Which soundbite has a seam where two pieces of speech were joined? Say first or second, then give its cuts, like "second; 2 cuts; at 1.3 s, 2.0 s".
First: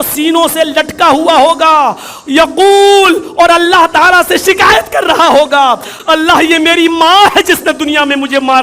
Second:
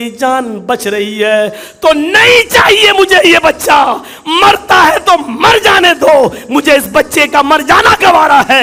first; 1 cut; at 5.9 s